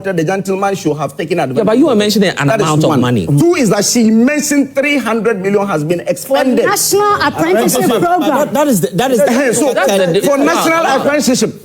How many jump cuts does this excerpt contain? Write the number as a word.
one